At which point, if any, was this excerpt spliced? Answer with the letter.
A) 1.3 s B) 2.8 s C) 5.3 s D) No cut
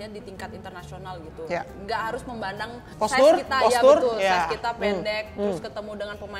B